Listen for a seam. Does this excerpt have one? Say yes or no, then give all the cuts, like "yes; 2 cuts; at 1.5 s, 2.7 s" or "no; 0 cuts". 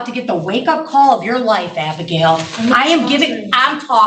no; 0 cuts